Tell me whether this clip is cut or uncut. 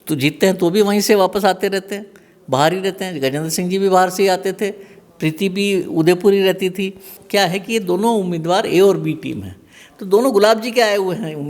cut